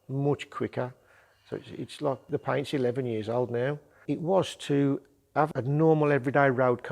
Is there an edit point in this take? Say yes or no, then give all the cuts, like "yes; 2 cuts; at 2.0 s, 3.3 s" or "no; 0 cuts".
yes; 3 cuts; at 2.2 s, 3.9 s, 5.6 s